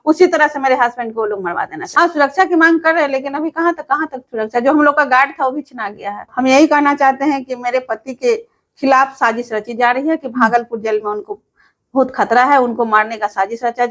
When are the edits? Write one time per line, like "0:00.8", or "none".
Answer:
0:01.8
0:06.2